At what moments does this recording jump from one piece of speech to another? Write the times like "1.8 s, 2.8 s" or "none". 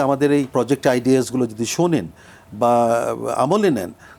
none